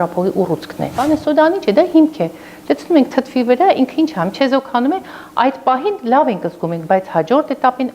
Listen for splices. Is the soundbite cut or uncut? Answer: cut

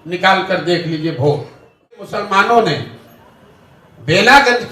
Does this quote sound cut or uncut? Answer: cut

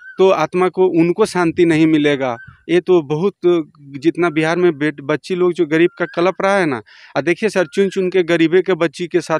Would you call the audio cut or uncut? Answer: uncut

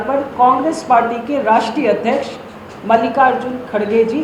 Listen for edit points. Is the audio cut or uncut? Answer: uncut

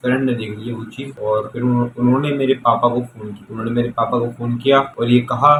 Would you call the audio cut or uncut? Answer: uncut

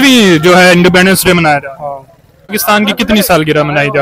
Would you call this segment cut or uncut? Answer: cut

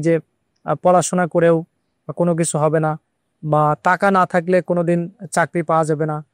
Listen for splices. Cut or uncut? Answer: uncut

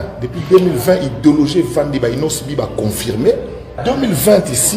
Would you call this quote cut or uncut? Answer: cut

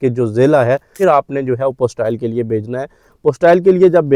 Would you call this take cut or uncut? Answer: cut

